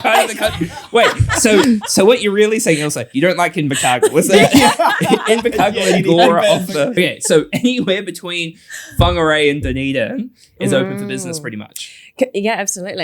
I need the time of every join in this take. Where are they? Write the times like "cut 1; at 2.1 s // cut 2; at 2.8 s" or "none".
cut 1; at 6.9 s